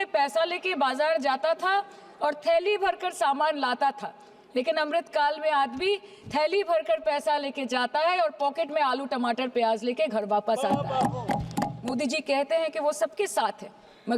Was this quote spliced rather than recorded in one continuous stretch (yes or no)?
yes